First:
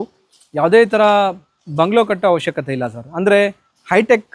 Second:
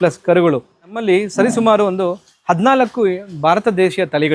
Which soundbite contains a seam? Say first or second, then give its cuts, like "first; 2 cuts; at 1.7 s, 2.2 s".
second; 1 cut; at 1.0 s